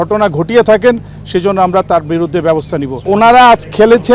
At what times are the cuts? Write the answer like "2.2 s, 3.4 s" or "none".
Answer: 3.0 s